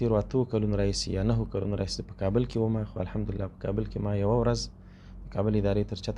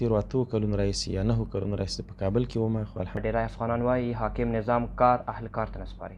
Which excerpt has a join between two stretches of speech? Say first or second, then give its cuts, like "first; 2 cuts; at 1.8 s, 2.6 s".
second; 1 cut; at 3.2 s